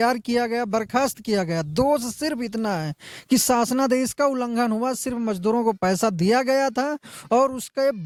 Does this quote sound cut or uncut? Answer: uncut